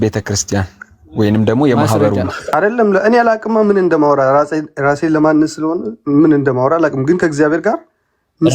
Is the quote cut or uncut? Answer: cut